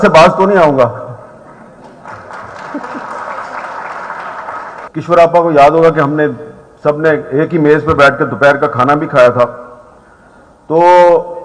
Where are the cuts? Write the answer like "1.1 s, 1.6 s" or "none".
none

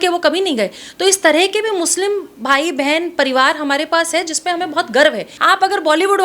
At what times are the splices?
5.3 s

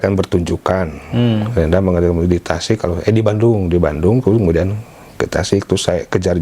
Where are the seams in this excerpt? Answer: none

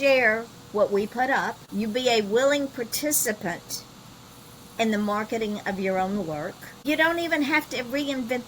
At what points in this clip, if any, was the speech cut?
1.6 s, 6.8 s

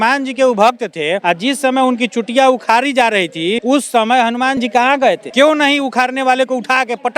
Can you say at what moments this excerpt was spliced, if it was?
1.2 s, 3.6 s, 5.2 s

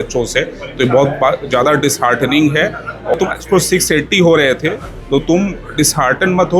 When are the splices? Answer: 3.1 s

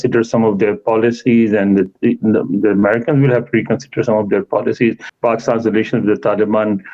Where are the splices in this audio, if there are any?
5.1 s

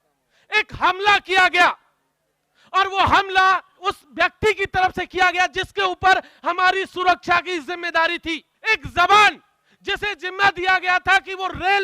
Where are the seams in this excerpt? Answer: 3.8 s, 8.5 s

